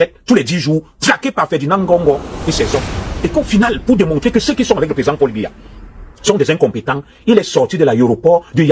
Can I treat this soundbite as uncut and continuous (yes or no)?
no